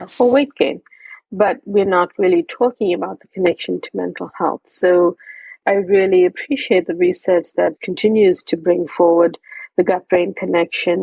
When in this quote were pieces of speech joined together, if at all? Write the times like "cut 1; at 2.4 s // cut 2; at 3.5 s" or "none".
cut 1; at 5.6 s // cut 2; at 7.8 s